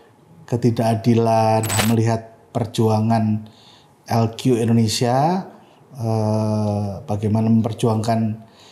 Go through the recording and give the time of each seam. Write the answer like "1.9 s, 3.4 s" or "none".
1.8 s